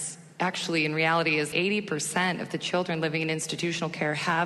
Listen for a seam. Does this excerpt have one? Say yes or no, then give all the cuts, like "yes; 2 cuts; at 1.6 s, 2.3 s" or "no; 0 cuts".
yes; 1 cut; at 1.5 s